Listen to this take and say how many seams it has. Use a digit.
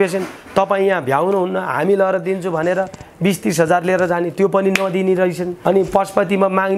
1